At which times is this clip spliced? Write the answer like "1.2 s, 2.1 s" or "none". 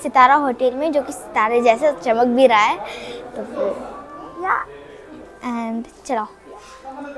none